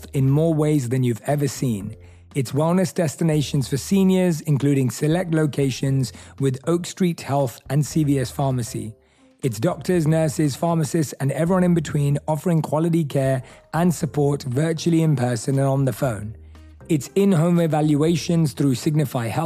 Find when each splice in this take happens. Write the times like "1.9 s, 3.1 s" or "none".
none